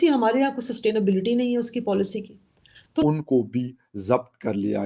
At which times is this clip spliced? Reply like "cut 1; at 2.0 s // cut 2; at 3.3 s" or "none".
cut 1; at 3.0 s